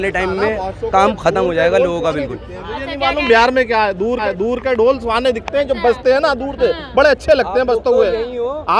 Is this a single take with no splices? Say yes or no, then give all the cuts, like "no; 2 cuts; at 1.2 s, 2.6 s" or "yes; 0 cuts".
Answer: yes; 0 cuts